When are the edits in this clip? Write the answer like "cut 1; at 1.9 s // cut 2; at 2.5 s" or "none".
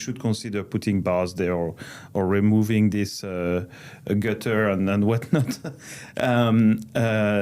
none